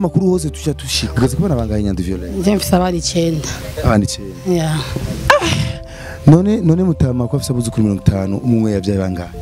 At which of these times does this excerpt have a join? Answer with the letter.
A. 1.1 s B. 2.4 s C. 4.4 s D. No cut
A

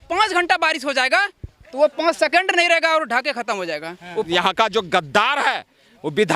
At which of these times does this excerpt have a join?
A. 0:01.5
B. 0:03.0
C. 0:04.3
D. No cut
C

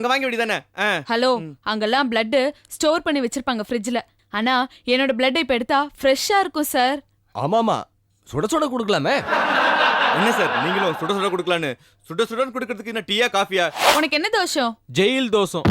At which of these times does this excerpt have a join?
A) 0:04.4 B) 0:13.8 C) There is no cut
B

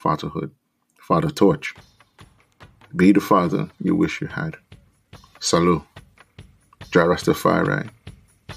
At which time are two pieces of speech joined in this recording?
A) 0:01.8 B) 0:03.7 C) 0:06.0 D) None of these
D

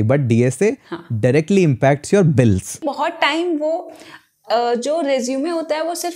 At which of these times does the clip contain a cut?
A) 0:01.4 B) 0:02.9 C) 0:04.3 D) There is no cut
B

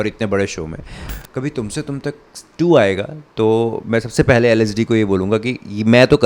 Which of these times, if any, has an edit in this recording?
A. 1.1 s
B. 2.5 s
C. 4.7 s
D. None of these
A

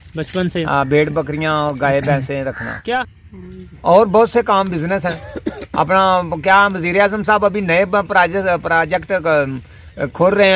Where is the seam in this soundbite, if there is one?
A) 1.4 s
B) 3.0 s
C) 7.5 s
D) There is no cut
B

